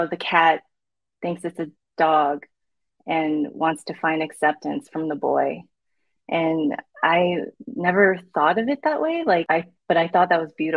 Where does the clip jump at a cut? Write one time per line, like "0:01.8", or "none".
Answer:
0:09.4